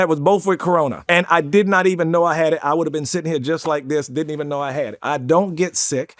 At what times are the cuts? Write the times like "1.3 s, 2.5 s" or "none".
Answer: none